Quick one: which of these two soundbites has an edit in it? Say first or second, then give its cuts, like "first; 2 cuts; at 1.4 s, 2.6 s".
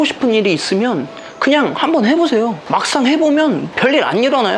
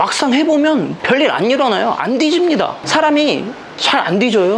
second; 1 cut; at 2.8 s